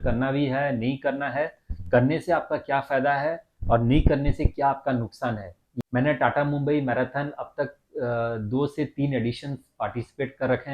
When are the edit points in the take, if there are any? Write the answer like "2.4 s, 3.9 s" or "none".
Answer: 5.6 s

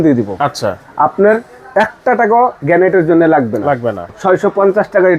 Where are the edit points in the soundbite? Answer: 4.1 s

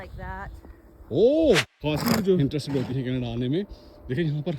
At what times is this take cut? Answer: 1.7 s, 2.4 s

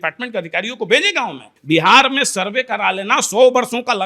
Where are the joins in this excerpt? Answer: 1.4 s

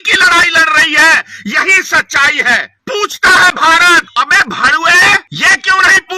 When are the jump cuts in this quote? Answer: 2.8 s, 4.1 s, 5.3 s

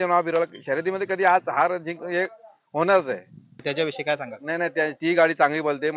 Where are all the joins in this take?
3.6 s

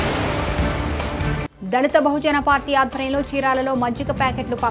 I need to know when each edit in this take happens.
none

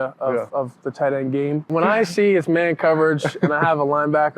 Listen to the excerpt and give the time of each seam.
1.7 s

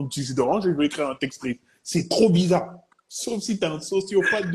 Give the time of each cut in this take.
none

